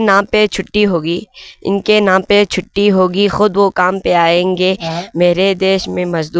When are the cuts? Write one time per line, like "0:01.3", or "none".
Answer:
none